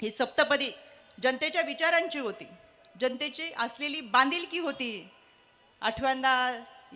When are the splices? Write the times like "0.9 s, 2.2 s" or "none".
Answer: none